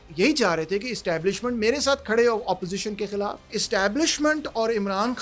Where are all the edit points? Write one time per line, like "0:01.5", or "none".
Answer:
0:03.5